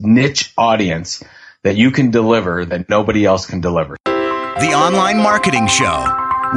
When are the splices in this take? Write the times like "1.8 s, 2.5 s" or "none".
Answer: 3.9 s

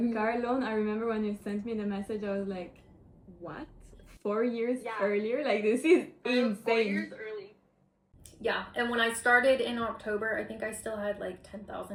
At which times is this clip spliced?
none

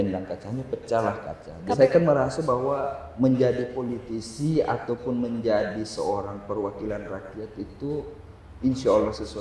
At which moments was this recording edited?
1.8 s

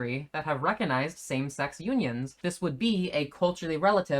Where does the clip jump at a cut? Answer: 2.4 s

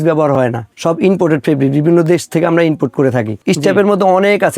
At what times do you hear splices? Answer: 3.4 s

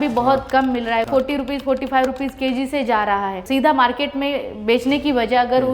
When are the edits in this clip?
1.0 s, 3.4 s

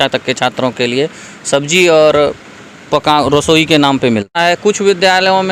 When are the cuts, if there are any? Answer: 4.3 s

